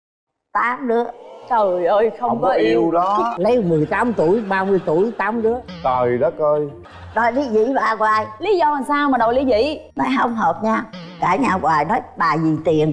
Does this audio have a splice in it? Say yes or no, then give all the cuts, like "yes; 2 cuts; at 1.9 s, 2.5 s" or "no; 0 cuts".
yes; 2 cuts; at 3.3 s, 6.8 s